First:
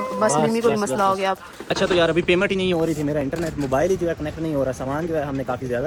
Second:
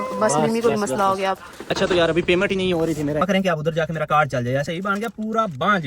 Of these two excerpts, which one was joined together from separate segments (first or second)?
second